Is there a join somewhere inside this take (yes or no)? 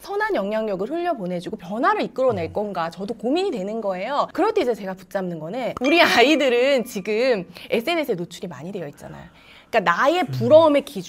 yes